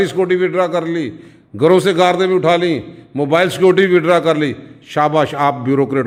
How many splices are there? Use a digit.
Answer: 0